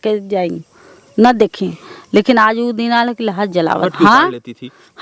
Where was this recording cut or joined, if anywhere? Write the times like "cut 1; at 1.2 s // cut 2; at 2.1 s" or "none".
cut 1; at 3.9 s